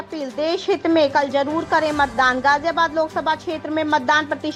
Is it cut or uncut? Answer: uncut